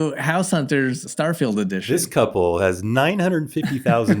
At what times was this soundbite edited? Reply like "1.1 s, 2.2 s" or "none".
1.0 s